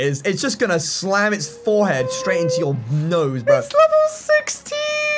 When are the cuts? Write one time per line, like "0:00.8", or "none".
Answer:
none